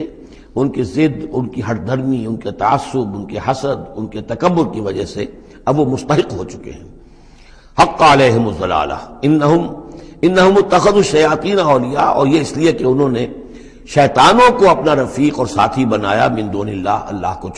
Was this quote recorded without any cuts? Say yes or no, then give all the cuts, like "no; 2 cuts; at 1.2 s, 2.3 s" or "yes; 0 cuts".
yes; 0 cuts